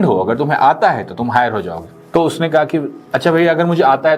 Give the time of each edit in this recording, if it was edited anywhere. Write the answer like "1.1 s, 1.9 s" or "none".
none